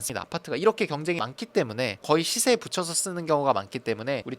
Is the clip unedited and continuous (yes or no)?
no